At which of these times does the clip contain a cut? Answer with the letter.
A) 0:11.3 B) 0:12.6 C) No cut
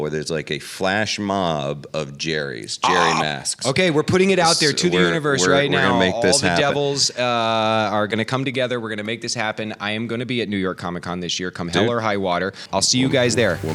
B